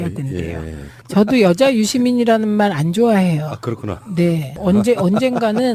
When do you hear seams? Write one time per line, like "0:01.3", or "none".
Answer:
0:03.3